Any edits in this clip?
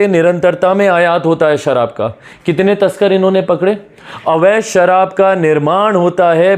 no; 0 cuts

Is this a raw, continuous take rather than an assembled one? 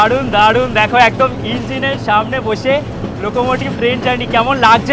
yes; 0 cuts

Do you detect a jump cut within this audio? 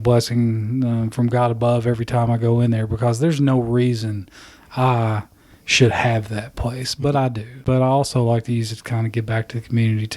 yes; 1 cut; at 7.5 s

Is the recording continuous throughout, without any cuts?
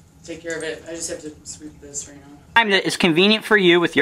no; 1 cut; at 2.5 s

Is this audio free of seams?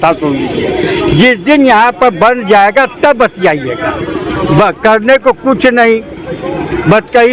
yes; 0 cuts

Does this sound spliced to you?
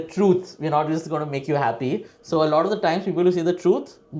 no; 0 cuts

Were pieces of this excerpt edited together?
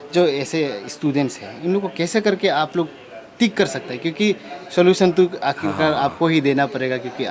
no; 0 cuts

